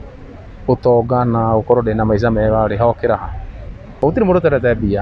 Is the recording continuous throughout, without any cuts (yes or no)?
no